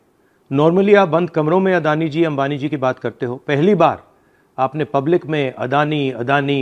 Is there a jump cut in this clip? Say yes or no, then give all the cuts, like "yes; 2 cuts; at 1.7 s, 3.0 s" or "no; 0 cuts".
no; 0 cuts